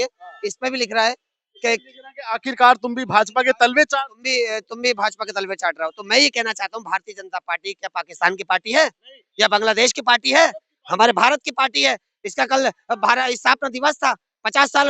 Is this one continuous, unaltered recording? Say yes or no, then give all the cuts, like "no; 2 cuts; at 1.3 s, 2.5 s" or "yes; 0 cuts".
yes; 0 cuts